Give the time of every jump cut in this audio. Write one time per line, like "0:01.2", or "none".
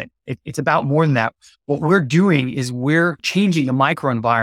0:03.3